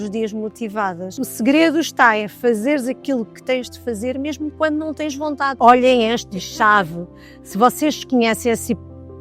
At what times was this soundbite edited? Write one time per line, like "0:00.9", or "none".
0:01.1
0:05.5